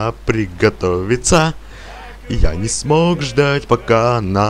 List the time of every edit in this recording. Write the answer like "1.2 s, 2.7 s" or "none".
none